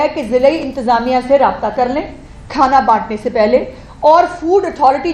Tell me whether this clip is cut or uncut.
uncut